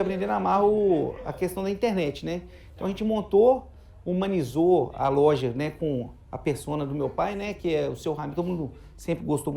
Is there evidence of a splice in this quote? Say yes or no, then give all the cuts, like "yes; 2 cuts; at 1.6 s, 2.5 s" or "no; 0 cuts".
no; 0 cuts